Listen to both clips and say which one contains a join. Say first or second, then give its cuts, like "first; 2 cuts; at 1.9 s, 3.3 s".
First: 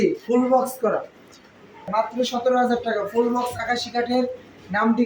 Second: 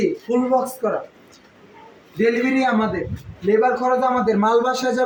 first; 1 cut; at 1.9 s